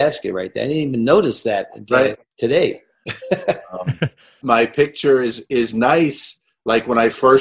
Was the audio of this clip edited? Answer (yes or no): yes